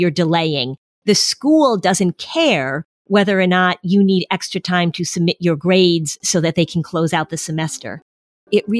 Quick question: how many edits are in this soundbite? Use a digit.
0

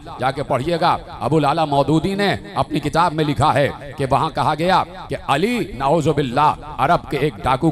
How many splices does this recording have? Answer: 0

